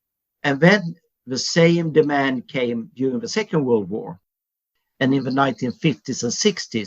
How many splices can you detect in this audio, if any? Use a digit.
1